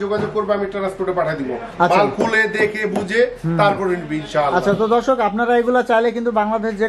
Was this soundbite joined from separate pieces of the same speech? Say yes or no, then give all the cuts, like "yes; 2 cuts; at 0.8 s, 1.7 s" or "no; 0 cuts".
no; 0 cuts